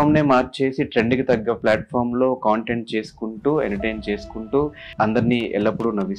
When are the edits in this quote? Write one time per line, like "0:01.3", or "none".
0:04.8

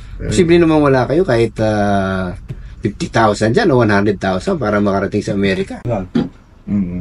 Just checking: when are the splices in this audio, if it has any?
0:05.9

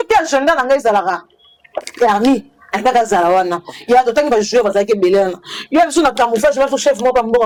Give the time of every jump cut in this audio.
none

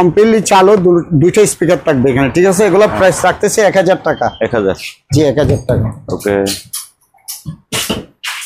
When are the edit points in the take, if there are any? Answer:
none

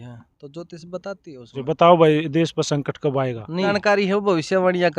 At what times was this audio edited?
0:01.6
0:03.7

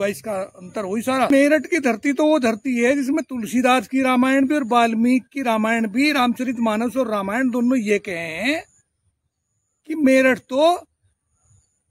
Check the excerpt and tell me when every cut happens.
0:01.3

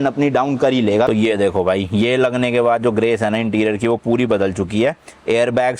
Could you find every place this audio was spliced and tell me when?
0:01.1

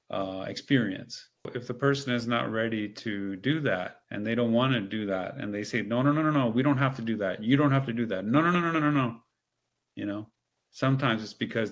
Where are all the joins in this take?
0:01.5
0:04.0

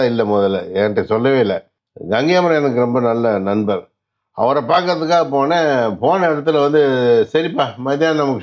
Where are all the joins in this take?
none

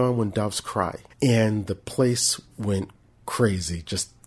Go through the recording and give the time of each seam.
0:01.0

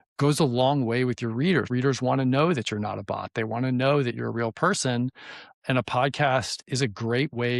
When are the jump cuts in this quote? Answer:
0:01.7

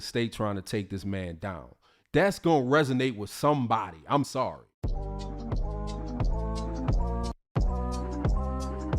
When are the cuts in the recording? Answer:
0:04.3

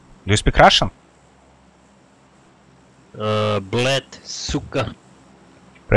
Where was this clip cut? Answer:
none

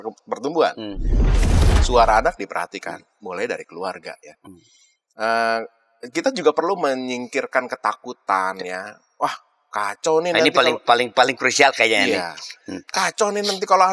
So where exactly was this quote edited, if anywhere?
0:01.4

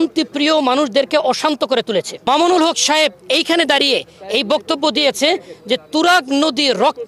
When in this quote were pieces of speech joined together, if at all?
0:02.1

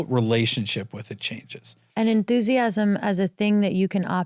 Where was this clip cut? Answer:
0:01.8

